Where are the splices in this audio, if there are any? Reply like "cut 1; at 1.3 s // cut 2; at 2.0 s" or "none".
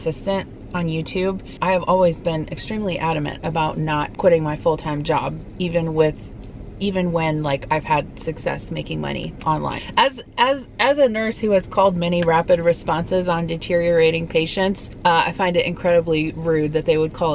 cut 1; at 1.6 s // cut 2; at 4.1 s // cut 3; at 9.8 s // cut 4; at 14.9 s

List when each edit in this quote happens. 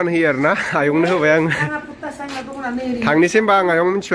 none

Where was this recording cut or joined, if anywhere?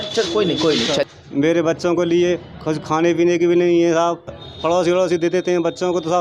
cut 1; at 1.1 s // cut 2; at 4.4 s

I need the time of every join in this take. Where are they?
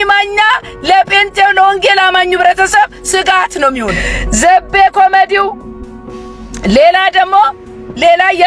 cut 1; at 4.4 s

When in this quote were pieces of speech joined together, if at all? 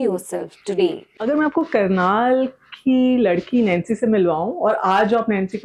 cut 1; at 1.2 s

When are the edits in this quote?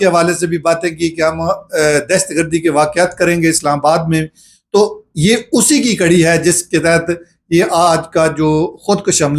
none

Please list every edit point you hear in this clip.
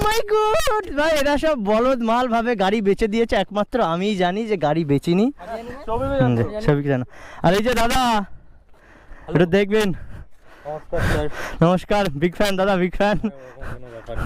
cut 1; at 0.9 s

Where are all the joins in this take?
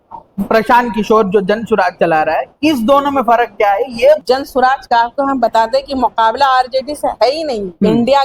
cut 1; at 4.2 s

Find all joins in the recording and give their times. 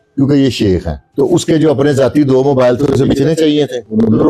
cut 1; at 1.0 s

